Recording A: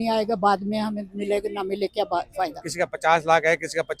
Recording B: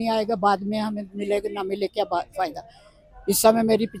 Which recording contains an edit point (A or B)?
A